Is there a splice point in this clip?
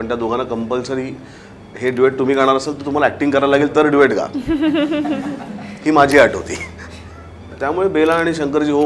yes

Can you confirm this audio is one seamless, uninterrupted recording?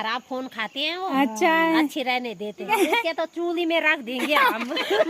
no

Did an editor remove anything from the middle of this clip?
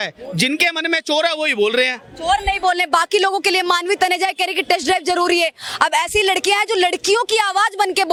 no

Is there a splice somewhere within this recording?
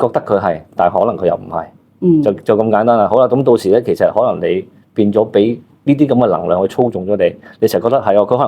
no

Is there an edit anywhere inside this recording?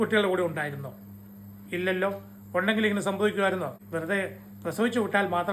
yes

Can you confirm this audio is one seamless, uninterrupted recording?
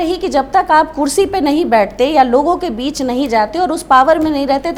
yes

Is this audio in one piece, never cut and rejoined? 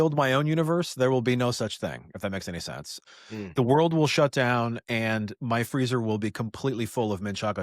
no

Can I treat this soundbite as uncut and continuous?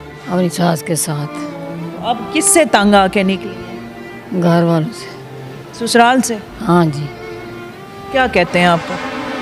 yes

